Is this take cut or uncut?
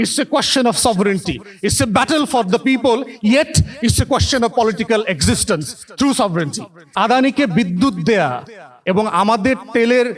cut